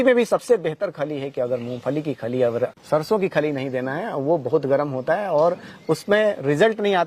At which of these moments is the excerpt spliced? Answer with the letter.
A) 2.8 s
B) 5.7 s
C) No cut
A